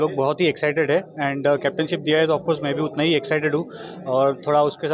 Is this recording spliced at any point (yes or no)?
no